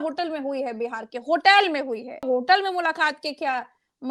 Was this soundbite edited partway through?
yes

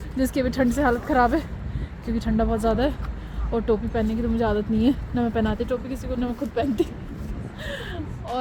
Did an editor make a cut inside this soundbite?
no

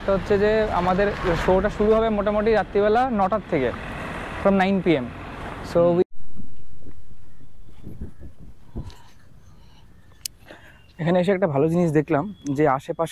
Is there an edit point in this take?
yes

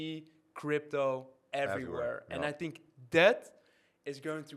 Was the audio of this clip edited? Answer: no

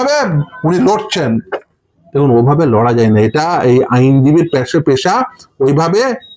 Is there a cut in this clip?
no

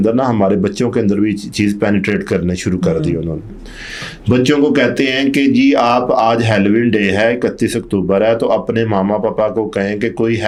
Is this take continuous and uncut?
yes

